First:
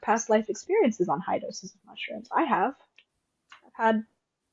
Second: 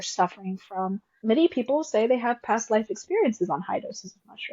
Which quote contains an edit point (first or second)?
second